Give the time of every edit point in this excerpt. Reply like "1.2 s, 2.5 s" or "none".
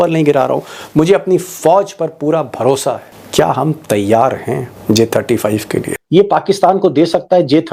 3.1 s, 6.0 s